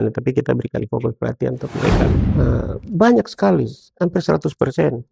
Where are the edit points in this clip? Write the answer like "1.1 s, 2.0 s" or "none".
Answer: 2.2 s

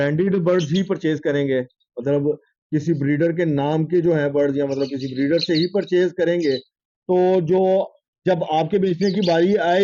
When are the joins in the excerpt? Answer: none

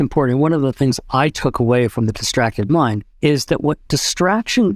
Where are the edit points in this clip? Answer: 3.1 s

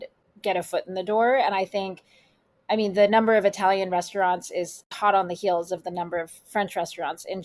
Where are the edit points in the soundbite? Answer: 4.8 s

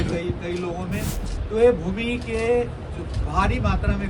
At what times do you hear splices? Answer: 1.3 s

